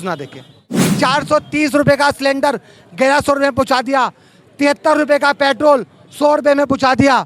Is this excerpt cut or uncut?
cut